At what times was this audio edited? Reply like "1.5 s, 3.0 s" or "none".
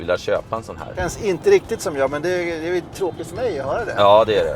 1.0 s